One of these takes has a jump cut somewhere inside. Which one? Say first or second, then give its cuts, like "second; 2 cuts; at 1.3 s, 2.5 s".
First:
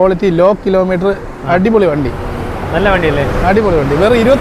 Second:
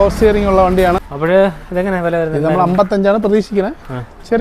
second; 1 cut; at 1.1 s